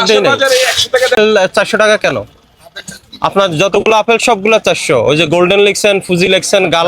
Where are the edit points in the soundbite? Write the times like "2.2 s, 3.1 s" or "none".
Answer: 1.2 s